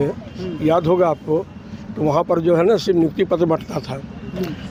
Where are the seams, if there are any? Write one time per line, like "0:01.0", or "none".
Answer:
none